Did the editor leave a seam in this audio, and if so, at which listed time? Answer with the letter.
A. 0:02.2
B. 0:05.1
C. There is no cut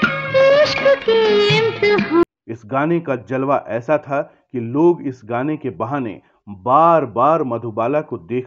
A